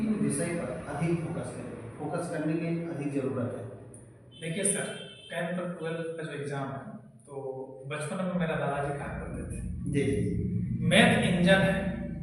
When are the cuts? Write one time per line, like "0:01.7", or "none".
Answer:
none